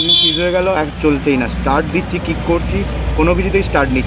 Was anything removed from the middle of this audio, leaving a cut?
no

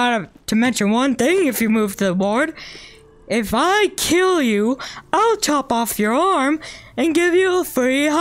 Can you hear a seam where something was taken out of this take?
no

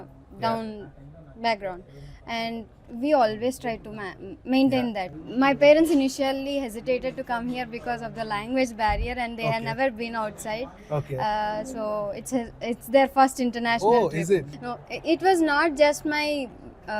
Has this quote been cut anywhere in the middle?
yes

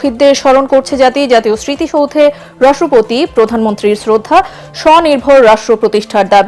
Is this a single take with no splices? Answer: yes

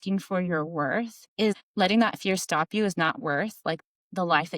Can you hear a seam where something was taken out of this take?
yes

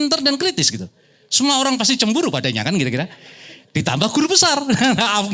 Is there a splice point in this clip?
no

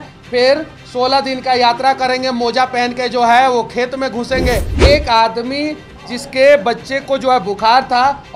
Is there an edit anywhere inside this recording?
yes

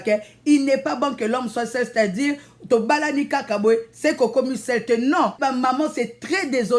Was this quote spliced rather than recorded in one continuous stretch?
yes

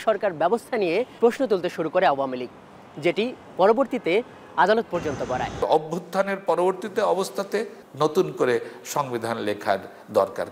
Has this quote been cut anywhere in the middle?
yes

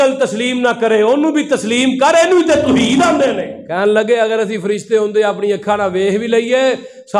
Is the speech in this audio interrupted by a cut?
yes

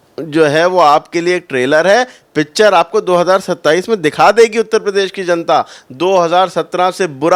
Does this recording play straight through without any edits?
yes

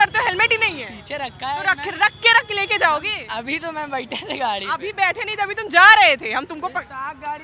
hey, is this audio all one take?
yes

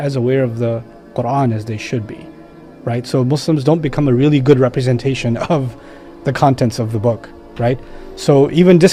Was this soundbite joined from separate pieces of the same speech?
no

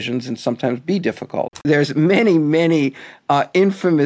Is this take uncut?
no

